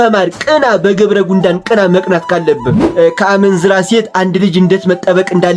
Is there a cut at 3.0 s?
yes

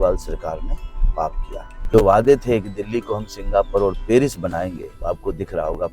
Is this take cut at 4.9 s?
yes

